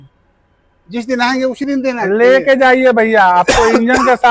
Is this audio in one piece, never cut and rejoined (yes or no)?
yes